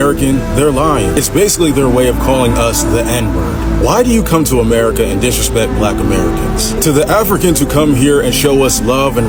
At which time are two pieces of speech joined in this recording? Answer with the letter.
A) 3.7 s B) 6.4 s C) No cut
C